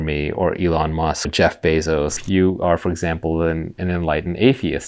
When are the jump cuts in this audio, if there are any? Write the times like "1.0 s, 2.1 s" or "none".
1.3 s, 2.2 s